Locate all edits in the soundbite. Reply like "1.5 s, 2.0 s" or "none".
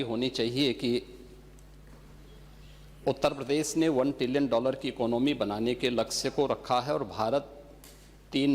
none